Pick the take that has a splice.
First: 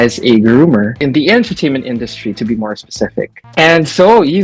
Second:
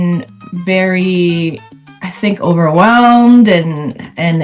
first; 1 cut; at 3.5 s

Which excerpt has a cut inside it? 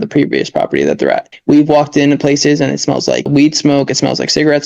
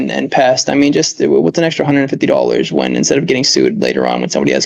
first; 2 cuts; at 1.3 s, 3.3 s

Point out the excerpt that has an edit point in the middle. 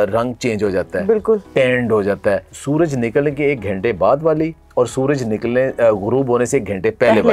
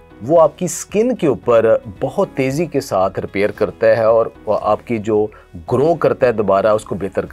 first; 1 cut; at 2.5 s

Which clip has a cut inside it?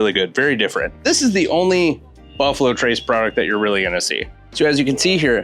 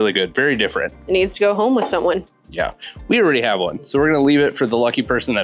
first; 2 cuts; at 1.0 s, 4.4 s

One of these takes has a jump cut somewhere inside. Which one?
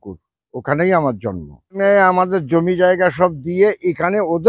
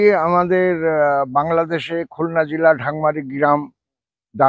first; 1 cut; at 1.8 s

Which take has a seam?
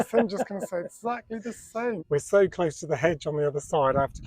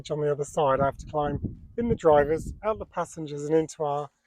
first; 1 cut; at 2.0 s

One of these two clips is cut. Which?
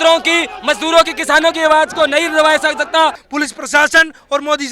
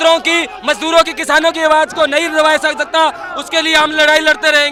first; 1 cut; at 3.2 s

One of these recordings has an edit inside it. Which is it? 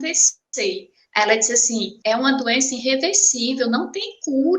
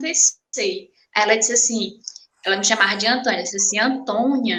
first; 1 cut; at 1.9 s

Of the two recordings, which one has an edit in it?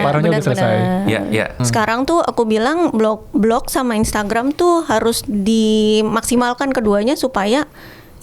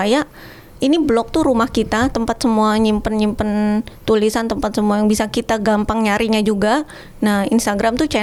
first; 1 cut; at 1.6 s

